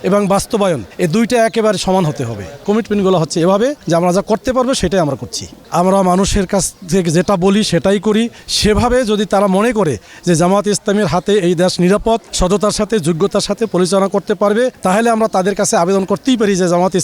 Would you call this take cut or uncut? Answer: cut